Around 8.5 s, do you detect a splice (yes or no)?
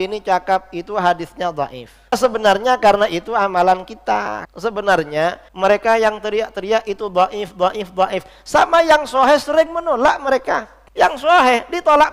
no